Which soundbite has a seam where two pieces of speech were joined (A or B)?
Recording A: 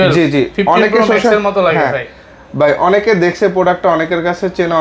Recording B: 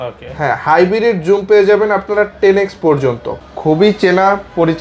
B